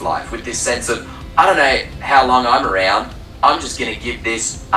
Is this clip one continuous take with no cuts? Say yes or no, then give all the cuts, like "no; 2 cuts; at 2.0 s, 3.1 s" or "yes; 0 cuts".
yes; 0 cuts